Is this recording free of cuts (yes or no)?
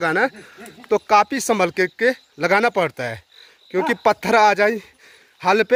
yes